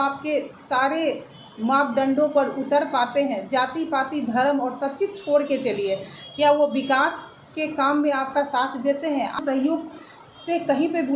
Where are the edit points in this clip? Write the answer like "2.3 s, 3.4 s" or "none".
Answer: none